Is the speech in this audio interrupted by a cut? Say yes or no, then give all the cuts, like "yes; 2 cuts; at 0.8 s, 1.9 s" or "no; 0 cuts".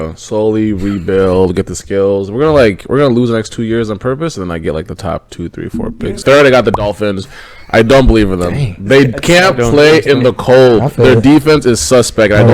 yes; 1 cut; at 6.2 s